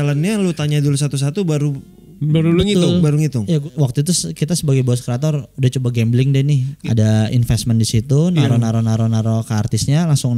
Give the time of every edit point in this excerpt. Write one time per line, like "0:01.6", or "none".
0:03.6
0:06.7